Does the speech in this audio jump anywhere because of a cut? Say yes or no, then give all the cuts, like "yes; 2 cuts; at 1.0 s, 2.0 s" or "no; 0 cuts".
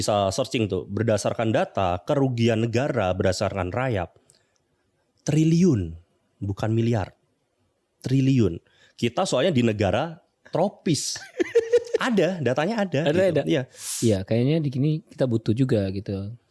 yes; 1 cut; at 13.8 s